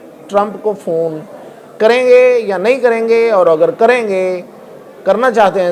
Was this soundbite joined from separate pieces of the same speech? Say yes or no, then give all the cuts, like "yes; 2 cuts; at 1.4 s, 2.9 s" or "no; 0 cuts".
no; 0 cuts